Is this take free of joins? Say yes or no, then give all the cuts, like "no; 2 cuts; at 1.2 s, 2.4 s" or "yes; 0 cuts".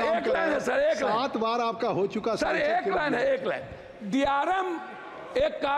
yes; 0 cuts